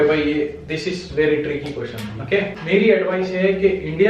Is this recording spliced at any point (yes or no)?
yes